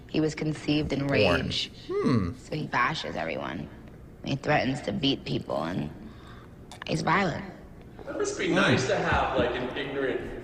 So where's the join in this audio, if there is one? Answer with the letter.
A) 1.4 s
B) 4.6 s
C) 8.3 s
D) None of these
D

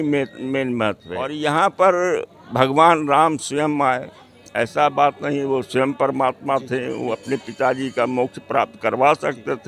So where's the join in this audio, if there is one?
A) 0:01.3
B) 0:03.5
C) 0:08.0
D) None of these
A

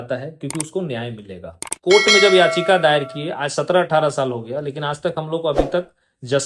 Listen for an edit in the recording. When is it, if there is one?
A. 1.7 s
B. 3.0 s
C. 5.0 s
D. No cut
A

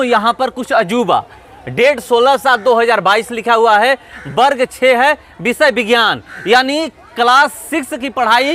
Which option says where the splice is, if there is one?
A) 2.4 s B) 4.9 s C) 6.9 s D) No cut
D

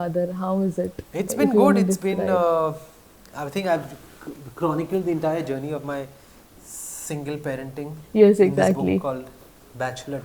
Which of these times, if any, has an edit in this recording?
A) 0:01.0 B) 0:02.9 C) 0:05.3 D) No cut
A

